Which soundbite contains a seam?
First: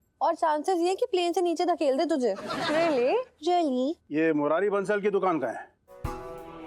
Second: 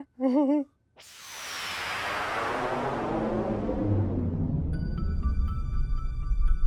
first; 1 cut; at 4.0 s

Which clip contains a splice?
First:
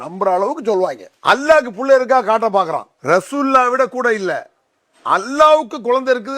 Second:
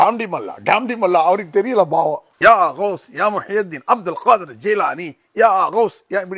first; 2 cuts; at 1.1 s, 2.9 s

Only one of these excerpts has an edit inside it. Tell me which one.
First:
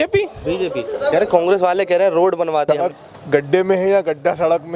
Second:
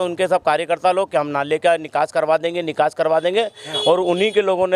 first; 1 cut; at 2.7 s

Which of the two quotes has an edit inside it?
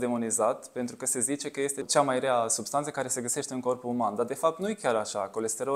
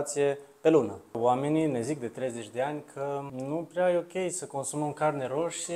second; 2 cuts; at 1.2 s, 3.3 s

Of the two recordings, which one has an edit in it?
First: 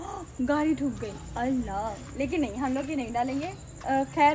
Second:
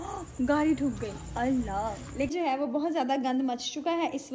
second; 1 cut; at 2.3 s

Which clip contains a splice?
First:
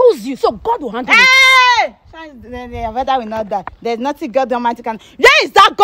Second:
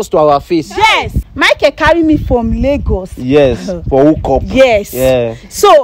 second; 1 cut; at 1.1 s

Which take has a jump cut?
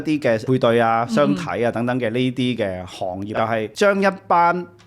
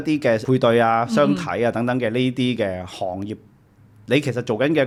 first; 1 cut; at 3.3 s

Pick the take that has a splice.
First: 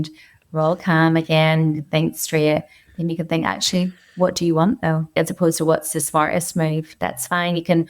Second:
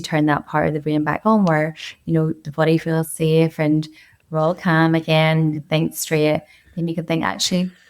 first; 1 cut; at 5.1 s

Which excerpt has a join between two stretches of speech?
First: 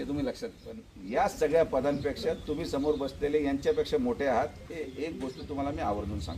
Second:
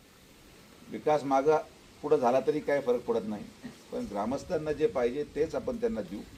first; 1 cut; at 0.9 s

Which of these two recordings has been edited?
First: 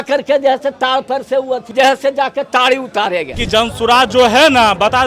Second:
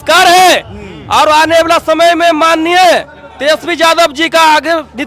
first; 2 cuts; at 1.7 s, 3.4 s

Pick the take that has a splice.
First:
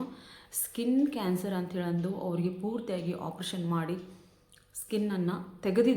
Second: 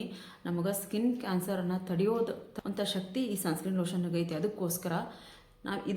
second; 1 cut; at 2.4 s

